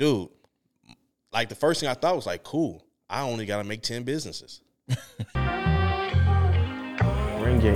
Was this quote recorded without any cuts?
no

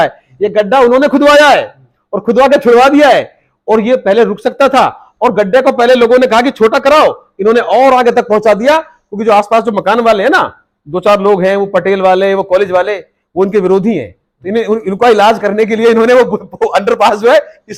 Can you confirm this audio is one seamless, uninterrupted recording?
yes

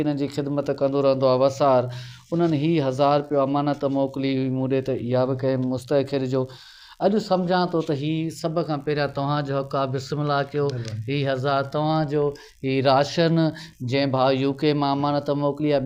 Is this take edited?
no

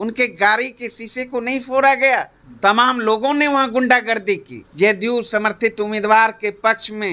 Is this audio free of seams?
no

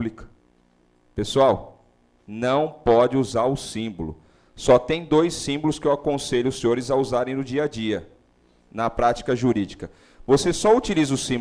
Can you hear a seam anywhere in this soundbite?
no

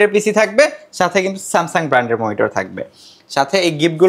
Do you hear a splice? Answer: no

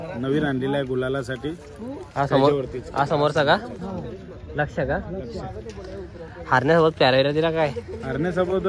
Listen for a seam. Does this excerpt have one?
no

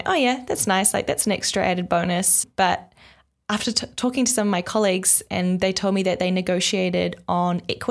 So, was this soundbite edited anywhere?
yes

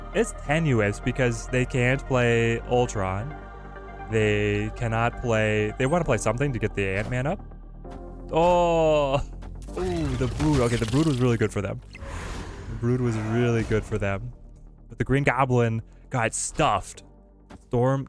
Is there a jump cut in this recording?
no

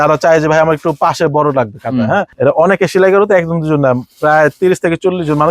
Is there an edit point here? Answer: yes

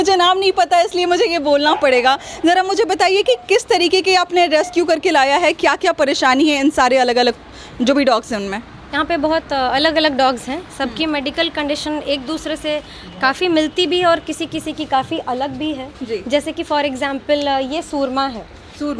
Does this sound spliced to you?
no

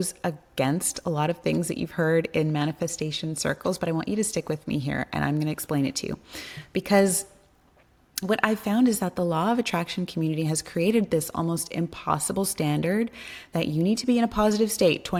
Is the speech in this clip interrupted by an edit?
no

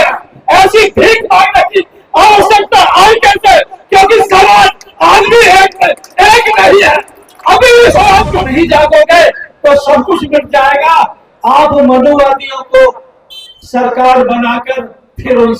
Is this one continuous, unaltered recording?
no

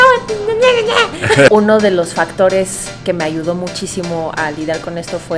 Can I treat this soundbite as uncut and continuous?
no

